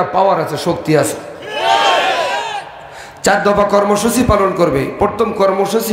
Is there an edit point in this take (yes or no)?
no